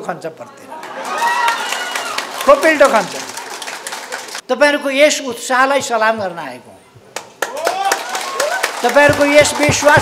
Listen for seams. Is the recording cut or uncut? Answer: cut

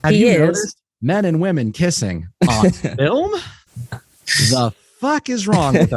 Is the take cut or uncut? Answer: uncut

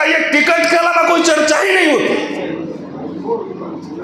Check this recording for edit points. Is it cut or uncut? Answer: uncut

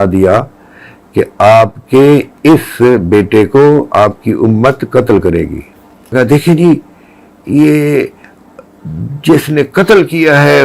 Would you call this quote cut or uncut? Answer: cut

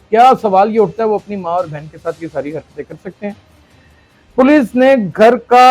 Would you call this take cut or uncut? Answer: uncut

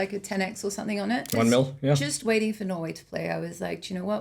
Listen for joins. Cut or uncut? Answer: cut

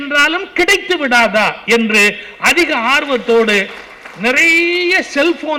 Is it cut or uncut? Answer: uncut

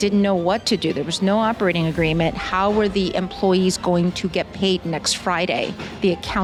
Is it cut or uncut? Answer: uncut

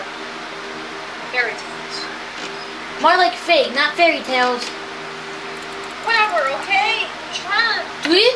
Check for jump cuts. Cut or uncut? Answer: uncut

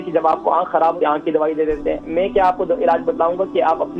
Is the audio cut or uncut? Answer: cut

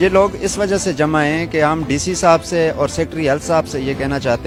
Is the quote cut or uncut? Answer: uncut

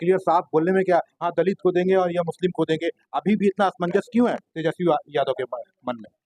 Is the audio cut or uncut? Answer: uncut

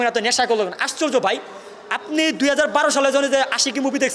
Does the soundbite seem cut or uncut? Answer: uncut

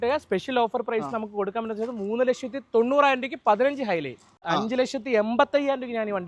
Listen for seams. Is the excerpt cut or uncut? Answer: cut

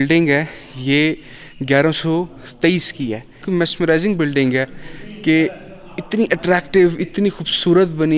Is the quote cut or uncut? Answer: cut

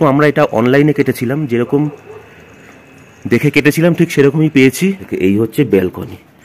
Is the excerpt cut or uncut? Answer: cut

